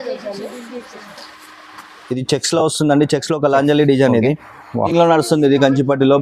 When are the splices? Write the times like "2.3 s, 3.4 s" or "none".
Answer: 4.9 s